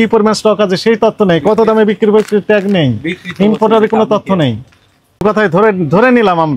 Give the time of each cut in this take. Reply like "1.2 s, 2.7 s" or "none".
5.2 s